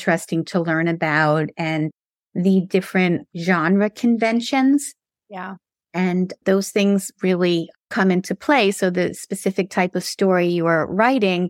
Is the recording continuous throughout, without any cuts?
yes; 0 cuts

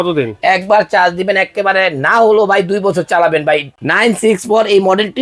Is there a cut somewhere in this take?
yes; 1 cut; at 3.8 s

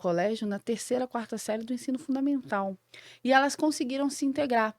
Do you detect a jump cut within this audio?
yes; 1 cut; at 2.9 s

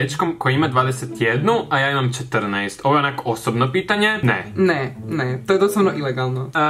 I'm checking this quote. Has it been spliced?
no; 0 cuts

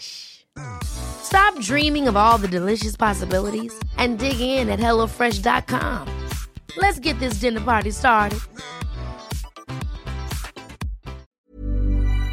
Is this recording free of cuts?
no; 1 cut; at 11.3 s

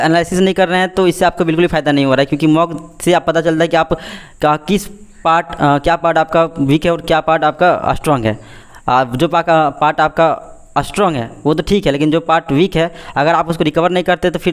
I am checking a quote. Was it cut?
no; 0 cuts

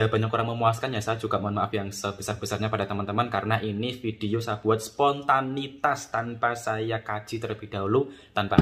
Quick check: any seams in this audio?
no; 0 cuts

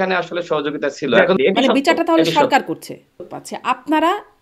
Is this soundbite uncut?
no; 2 cuts; at 1.3 s, 3.4 s

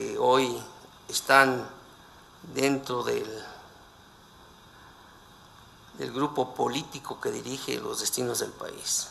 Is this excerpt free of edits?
yes; 0 cuts

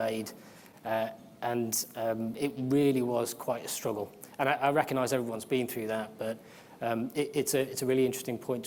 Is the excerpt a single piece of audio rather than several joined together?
yes; 0 cuts

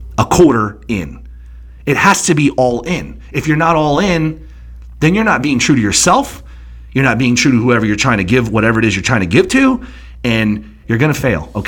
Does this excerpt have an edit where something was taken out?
yes; 1 cut; at 10.8 s

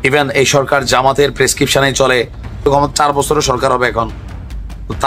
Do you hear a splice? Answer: yes; 1 cut; at 2.7 s

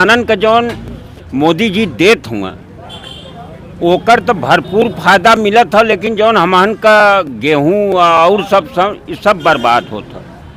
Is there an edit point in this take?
no; 0 cuts

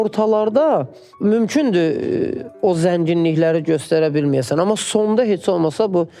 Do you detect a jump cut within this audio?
yes; 1 cut; at 1.0 s

